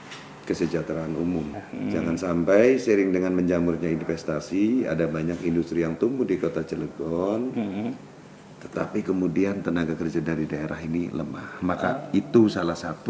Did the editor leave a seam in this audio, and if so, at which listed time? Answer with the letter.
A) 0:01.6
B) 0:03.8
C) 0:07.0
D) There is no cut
A